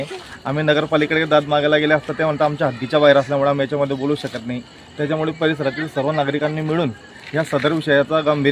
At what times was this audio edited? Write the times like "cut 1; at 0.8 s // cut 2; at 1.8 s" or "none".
none